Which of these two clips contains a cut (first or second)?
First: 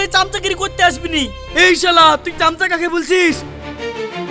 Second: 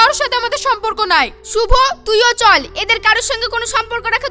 first